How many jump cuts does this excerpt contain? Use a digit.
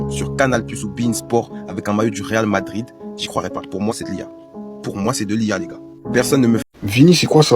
1